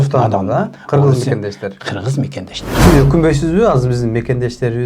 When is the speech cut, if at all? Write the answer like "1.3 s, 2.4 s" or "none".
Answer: 2.6 s